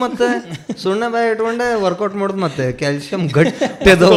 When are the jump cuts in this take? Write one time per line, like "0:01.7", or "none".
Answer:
none